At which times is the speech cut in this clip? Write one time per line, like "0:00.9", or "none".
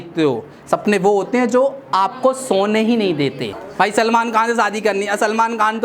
0:03.6